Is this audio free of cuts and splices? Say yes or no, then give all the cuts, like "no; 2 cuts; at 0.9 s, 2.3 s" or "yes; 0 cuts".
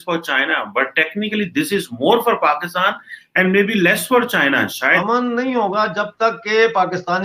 no; 1 cut; at 5.0 s